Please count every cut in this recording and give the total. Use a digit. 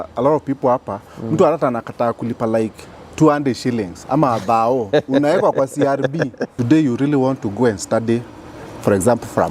1